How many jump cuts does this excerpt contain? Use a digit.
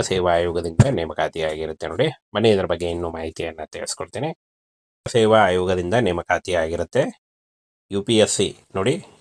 1